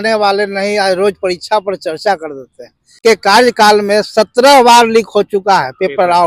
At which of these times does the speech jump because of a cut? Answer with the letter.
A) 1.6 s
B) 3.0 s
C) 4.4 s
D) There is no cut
B